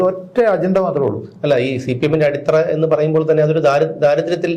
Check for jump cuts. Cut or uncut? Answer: uncut